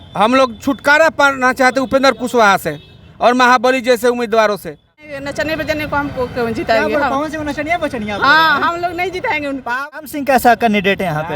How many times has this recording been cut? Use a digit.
2